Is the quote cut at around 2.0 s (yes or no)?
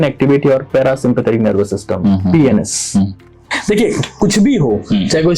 no